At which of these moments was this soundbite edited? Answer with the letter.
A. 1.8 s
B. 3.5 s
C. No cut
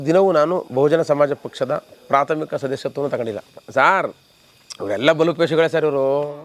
B